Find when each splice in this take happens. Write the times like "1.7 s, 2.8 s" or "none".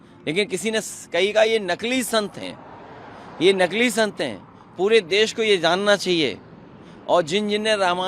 none